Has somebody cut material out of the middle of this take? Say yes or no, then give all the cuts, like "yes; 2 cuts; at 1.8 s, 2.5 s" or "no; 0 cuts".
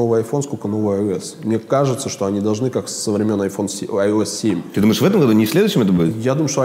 no; 0 cuts